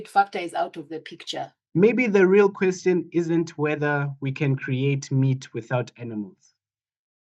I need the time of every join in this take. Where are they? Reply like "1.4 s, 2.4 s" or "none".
1.6 s